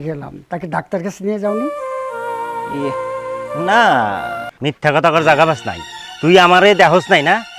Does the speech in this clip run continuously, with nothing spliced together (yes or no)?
no